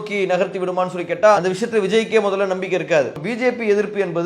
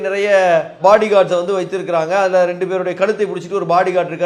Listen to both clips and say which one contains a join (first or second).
first